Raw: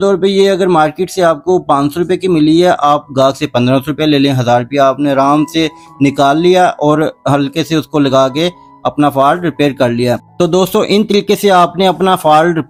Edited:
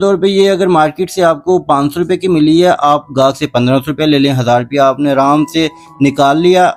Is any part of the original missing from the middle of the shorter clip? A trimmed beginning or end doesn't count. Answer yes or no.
no